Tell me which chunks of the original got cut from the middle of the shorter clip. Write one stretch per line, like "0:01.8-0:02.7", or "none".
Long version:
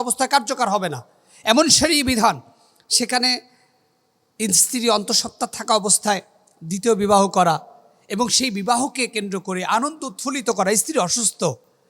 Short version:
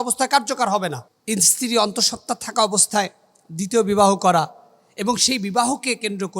0:01.1-0:04.2